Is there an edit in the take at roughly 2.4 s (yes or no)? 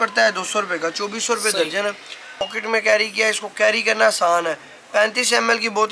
yes